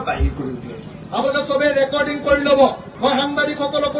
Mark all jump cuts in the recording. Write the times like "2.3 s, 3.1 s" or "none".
none